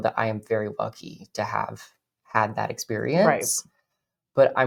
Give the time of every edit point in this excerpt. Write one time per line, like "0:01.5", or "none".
none